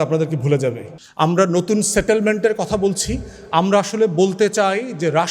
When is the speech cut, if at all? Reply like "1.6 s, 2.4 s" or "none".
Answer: 0.9 s

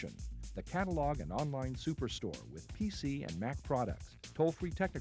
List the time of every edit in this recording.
none

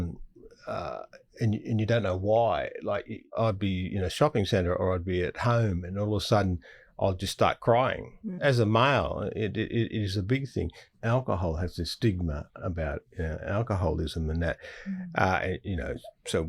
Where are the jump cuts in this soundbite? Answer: 3.4 s, 8.4 s, 10.9 s

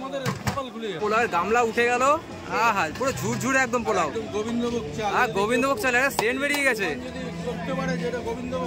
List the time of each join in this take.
1.0 s

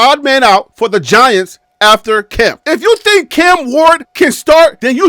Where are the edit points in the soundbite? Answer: 2.6 s

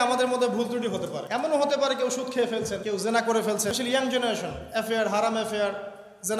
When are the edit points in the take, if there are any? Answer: 1.2 s, 2.8 s, 3.7 s

